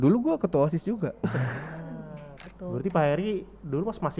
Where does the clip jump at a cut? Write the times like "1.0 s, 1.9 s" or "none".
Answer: 2.4 s